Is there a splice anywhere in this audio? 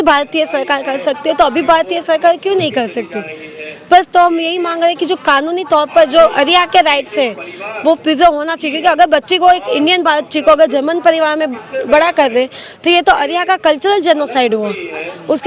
no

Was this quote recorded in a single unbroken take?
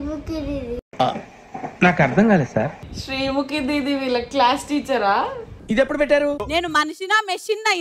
no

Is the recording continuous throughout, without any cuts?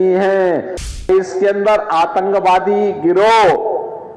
no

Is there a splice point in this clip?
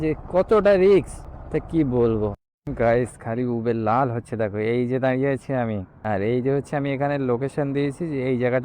yes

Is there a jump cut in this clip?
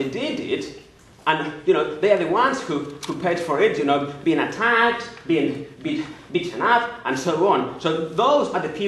no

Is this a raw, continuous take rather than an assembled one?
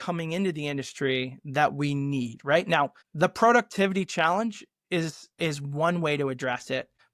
yes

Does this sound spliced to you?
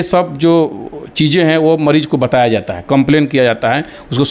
no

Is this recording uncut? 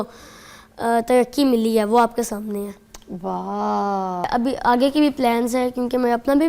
no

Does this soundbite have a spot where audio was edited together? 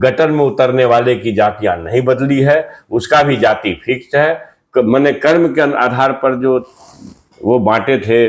no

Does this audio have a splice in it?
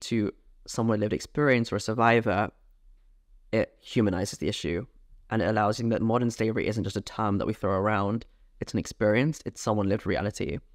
no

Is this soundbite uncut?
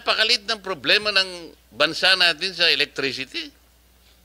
yes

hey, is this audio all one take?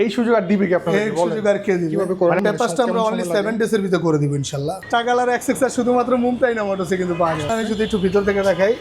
no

